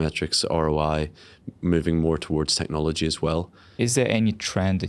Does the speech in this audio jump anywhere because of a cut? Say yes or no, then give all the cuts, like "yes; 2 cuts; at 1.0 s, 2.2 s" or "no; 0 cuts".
yes; 1 cut; at 3.6 s